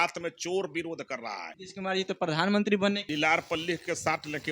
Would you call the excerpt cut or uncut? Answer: cut